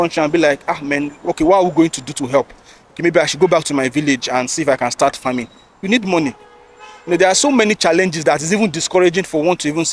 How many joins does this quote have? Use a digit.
0